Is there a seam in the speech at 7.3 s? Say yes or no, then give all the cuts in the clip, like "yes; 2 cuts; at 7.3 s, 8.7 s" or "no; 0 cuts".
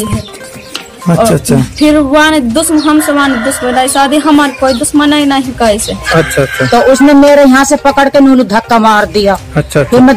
no; 1 cut; at 6.0 s